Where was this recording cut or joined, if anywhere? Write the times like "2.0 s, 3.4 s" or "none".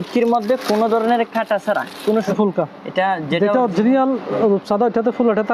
2.3 s